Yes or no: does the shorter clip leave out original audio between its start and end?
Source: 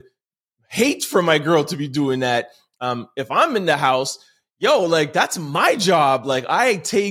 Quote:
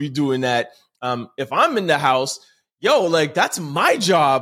no